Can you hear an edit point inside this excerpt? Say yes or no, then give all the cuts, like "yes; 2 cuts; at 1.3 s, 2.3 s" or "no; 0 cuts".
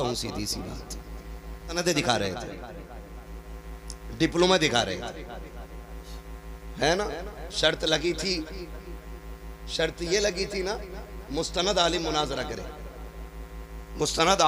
yes; 1 cut; at 1.8 s